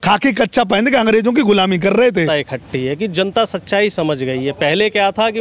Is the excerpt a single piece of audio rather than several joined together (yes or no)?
no